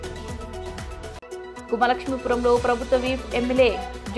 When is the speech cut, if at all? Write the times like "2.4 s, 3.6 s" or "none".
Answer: 1.2 s